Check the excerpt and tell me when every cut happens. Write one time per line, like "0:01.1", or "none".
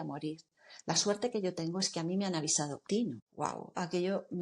0:03.1